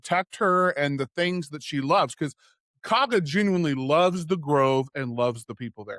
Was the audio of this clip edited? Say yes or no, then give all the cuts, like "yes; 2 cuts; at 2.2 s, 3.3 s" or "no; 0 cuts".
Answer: no; 0 cuts